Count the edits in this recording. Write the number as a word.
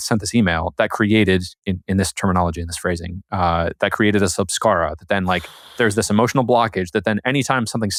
zero